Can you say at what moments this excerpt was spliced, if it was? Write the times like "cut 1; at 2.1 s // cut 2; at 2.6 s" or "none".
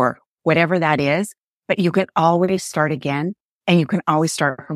none